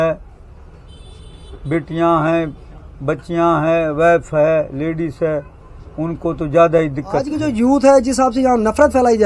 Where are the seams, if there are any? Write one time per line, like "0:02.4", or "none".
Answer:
0:07.5